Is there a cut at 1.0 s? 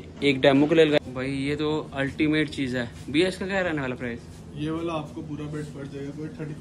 yes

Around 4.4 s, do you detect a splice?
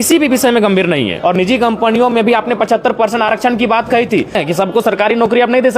yes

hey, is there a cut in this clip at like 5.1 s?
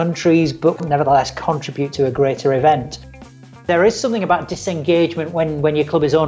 no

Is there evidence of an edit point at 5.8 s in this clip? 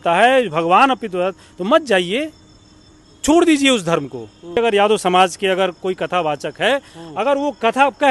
no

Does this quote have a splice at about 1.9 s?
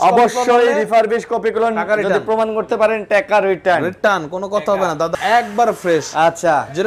no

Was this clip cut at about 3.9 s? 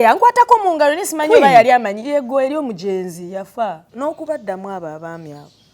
yes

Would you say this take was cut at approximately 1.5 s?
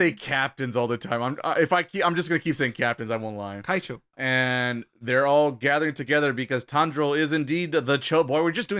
no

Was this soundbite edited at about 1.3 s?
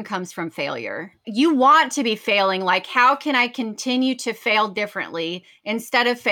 yes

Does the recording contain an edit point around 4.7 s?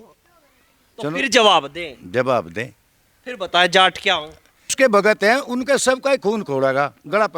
yes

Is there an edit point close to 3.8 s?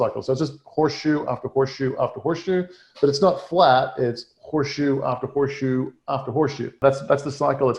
no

